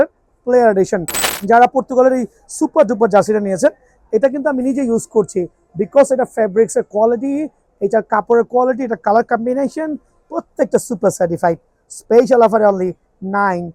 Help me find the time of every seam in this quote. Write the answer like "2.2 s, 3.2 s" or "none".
1.1 s